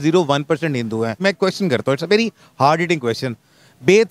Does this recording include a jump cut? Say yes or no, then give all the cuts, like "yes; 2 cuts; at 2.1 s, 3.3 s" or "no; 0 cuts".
yes; 1 cut; at 1.1 s